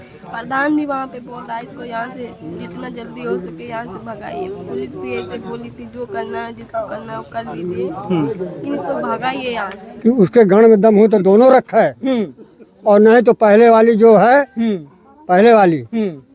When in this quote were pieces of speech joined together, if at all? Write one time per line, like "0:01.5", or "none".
0:09.8